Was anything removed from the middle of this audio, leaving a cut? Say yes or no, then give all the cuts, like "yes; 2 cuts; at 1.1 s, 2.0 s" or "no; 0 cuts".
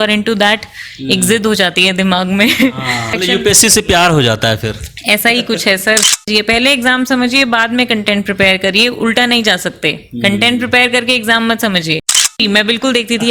yes; 3 cuts; at 3.2 s, 6.3 s, 12.4 s